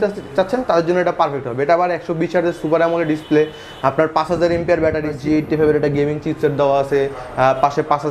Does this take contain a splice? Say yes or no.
yes